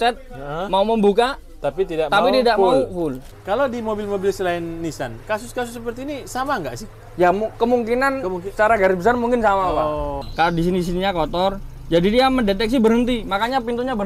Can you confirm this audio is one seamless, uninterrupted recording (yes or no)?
no